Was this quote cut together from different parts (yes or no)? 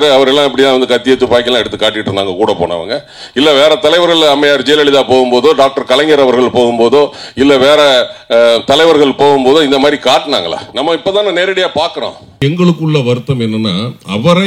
yes